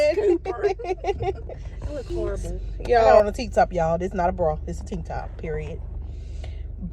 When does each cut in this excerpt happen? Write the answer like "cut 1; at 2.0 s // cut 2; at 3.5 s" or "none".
cut 1; at 3.1 s